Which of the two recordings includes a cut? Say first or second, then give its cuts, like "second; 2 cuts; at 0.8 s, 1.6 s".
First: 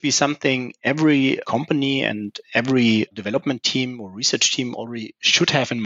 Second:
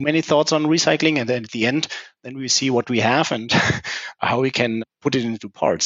second; 1 cut; at 4.8 s